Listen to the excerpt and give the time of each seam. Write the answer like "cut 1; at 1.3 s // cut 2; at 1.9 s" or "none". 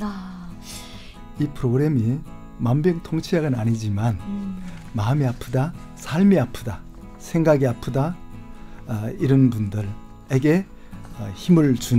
cut 1; at 1.1 s